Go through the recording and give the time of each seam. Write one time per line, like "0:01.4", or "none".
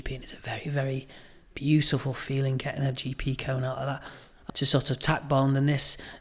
0:04.4